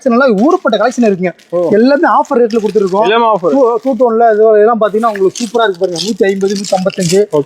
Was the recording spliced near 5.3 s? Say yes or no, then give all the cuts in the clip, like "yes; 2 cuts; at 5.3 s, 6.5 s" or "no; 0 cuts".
no; 0 cuts